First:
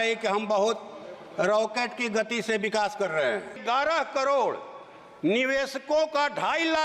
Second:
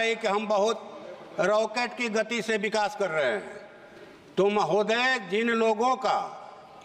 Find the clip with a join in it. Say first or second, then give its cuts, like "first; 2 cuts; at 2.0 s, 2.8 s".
first; 1 cut; at 3.6 s